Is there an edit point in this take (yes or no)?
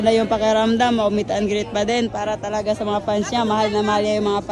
no